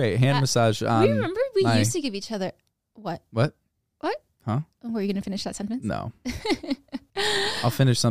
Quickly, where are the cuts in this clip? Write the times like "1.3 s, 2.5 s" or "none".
none